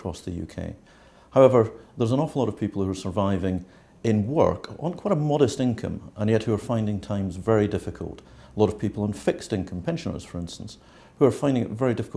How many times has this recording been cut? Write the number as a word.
one